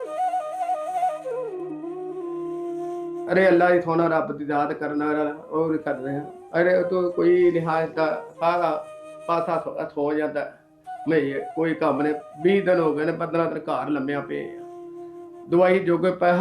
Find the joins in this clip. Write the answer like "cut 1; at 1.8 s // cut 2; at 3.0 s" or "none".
cut 1; at 3.2 s